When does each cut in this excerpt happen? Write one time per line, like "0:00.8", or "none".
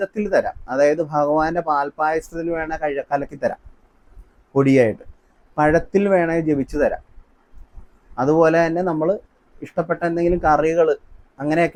none